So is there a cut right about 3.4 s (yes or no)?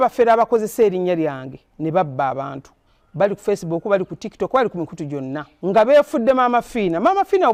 no